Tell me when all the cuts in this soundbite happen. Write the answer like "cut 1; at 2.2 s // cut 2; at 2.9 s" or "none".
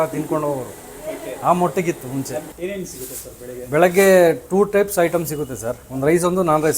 cut 1; at 2.5 s